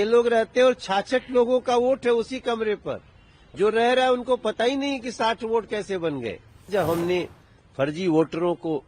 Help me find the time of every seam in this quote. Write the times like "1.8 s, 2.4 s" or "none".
6.7 s